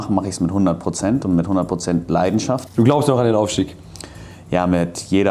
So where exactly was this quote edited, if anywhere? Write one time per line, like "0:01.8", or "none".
0:02.7